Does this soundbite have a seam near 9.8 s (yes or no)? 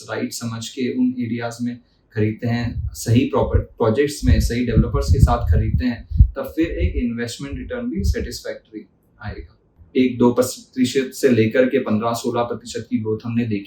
yes